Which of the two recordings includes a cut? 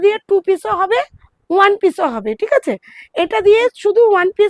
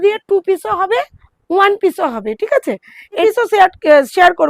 second; 1 cut; at 3.2 s

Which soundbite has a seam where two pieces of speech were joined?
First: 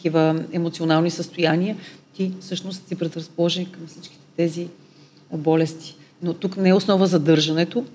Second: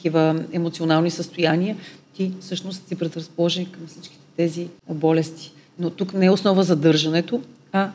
second; 1 cut; at 4.7 s

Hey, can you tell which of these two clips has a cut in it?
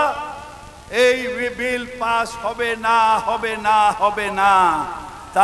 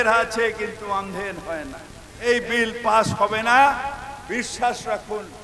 second; 1 cut; at 2.3 s

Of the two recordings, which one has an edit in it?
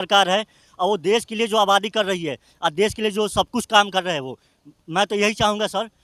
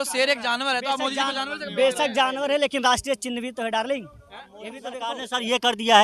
second; 1 cut; at 4.8 s

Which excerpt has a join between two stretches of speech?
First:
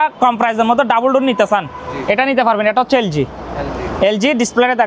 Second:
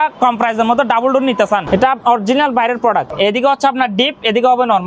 second; 2 cuts; at 1.6 s, 3.1 s

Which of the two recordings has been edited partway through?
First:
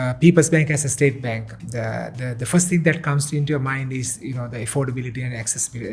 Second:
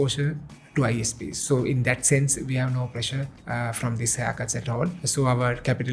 second; 2 cuts; at 3.4 s, 5.0 s

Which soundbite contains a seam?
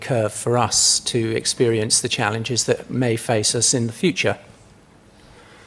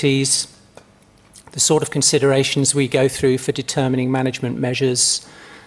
first; 1 cut; at 1.5 s

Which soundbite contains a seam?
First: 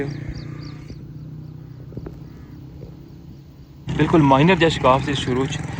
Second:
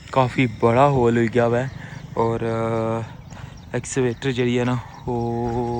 first; 1 cut; at 3.9 s

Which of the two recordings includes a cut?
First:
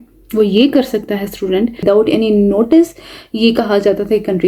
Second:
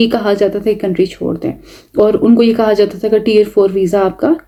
first; 1 cut; at 1.8 s

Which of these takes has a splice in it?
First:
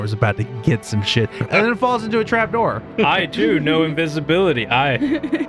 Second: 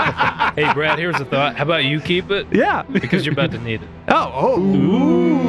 first; 2 cuts; at 1.4 s, 2.9 s

